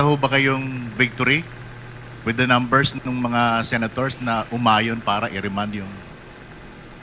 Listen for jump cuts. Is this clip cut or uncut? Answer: uncut